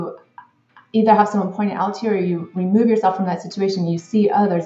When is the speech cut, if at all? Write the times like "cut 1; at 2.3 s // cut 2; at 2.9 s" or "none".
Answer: none

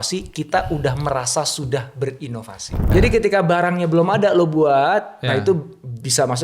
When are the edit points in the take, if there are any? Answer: cut 1; at 2.8 s

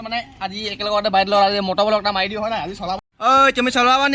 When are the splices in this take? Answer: cut 1; at 2.9 s

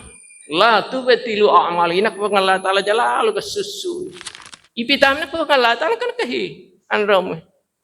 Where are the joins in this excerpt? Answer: cut 1; at 4.2 s

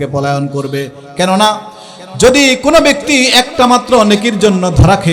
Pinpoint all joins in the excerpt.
none

